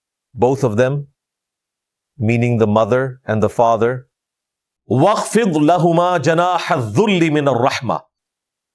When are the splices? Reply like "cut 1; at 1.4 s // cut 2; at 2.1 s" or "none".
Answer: cut 1; at 4.7 s